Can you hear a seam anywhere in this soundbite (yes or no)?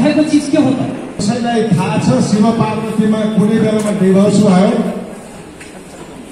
yes